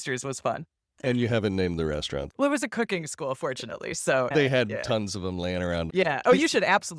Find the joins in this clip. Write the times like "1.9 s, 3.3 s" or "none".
4.3 s, 5.9 s